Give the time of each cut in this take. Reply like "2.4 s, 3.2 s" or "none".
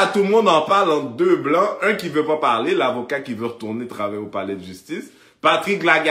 none